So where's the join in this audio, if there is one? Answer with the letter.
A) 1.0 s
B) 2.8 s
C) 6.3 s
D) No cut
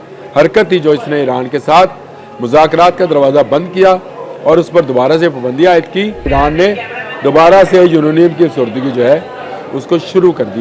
C